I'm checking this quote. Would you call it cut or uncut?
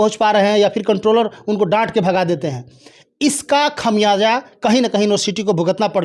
uncut